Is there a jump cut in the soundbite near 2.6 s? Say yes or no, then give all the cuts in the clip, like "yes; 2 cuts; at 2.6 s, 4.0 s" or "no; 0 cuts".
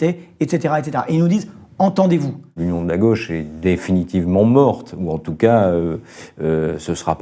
yes; 1 cut; at 2.6 s